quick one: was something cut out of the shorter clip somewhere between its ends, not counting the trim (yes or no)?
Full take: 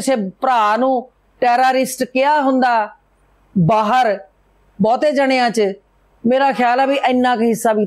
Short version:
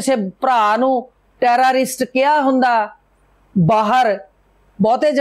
no